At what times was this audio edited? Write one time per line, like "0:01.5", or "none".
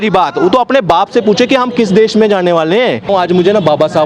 0:03.1